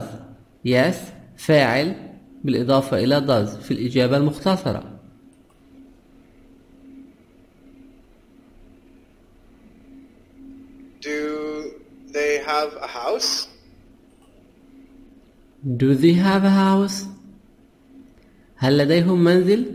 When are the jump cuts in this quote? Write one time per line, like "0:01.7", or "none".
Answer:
none